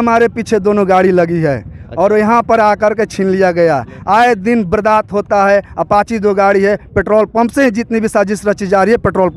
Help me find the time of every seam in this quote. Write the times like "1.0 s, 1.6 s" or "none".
none